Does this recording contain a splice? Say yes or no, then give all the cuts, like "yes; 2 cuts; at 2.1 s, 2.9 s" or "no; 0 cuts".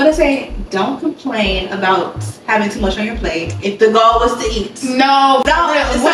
no; 0 cuts